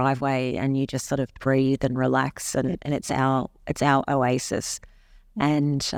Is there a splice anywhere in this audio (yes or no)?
no